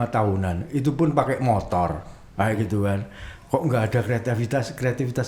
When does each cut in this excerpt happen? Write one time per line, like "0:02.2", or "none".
none